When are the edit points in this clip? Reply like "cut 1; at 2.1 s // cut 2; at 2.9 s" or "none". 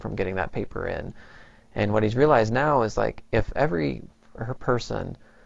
none